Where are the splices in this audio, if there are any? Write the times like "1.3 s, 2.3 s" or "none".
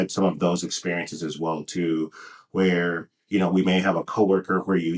none